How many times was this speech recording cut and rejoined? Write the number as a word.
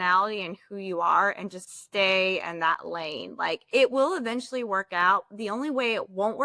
zero